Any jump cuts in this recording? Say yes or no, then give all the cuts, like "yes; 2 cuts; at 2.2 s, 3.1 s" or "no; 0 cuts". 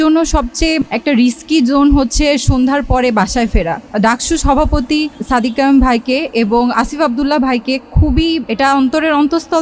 yes; 5 cuts; at 0.8 s, 3.8 s, 5.2 s, 6.7 s, 8.4 s